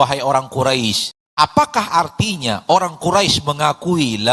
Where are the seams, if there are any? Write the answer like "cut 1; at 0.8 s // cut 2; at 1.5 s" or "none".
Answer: cut 1; at 1.1 s